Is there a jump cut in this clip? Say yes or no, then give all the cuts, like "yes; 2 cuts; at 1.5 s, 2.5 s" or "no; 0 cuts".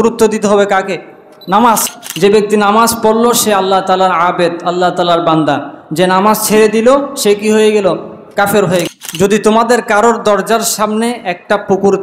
yes; 2 cuts; at 1.9 s, 8.9 s